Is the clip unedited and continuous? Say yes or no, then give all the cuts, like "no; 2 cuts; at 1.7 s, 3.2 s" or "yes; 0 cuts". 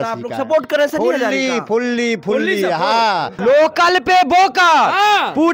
no; 1 cut; at 3.3 s